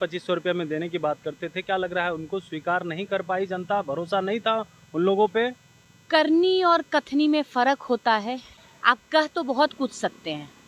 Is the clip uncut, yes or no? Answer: no